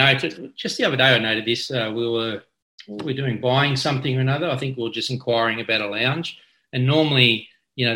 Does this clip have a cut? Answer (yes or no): no